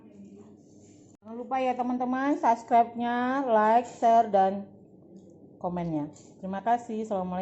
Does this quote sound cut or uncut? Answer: cut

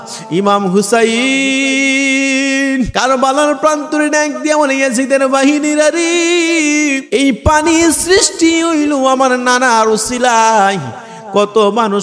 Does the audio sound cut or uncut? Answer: cut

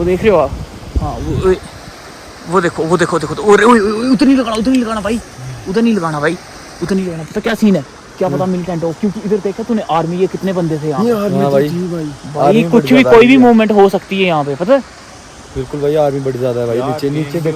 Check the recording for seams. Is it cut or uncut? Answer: uncut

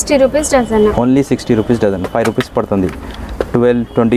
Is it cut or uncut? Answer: uncut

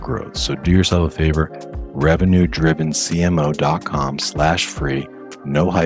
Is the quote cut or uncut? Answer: uncut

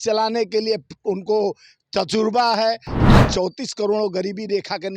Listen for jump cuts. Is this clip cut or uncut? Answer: cut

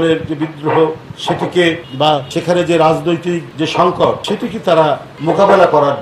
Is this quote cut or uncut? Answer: uncut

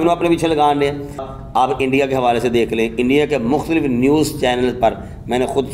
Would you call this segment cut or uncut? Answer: cut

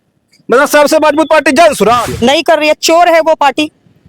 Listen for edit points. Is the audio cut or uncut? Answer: cut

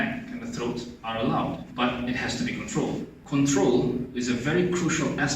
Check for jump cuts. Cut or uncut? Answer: cut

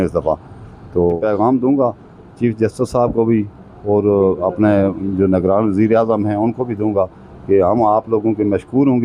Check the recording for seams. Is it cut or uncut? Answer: cut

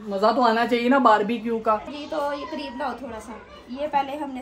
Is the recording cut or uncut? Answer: cut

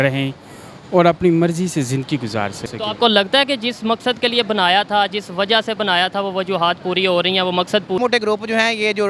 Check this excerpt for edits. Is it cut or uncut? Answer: cut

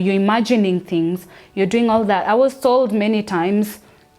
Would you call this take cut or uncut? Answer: uncut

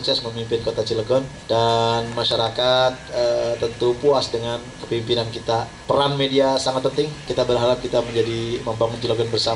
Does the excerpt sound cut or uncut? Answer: cut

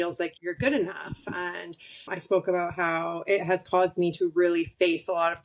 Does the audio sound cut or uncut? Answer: uncut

